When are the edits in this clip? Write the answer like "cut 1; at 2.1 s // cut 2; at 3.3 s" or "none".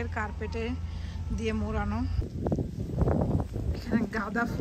cut 1; at 2.2 s